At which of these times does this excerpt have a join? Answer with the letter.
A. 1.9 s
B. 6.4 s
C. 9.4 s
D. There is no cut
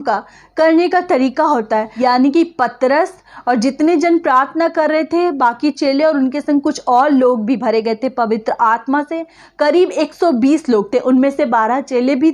A